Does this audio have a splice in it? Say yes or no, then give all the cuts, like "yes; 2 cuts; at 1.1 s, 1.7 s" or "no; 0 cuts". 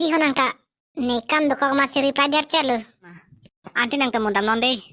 yes; 1 cut; at 3.2 s